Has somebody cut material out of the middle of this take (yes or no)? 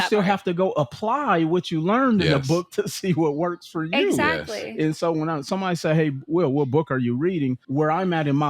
yes